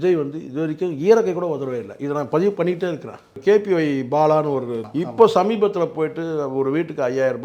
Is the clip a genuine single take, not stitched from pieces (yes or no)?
no